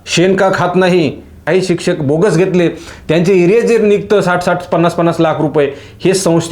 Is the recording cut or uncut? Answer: cut